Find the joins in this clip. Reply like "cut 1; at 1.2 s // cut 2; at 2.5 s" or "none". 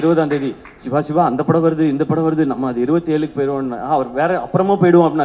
none